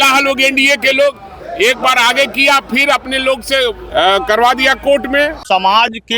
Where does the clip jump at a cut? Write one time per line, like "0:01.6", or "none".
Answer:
0:03.8
0:05.4